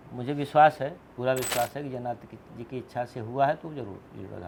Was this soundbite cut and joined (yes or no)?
no